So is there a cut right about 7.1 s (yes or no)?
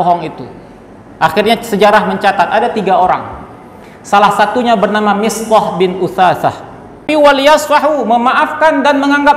yes